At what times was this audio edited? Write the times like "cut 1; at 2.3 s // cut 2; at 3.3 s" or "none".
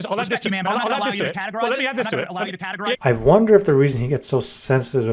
cut 1; at 3.0 s